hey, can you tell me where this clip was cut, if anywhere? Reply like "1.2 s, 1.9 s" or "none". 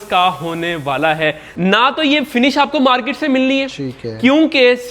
1.5 s